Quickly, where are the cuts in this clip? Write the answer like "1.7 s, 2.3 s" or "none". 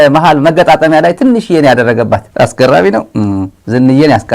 2.2 s